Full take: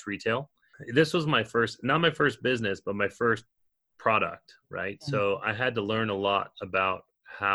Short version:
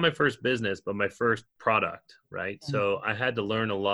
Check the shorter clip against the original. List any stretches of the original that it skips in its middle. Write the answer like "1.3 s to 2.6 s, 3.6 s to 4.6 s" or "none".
3.5 s to 3.9 s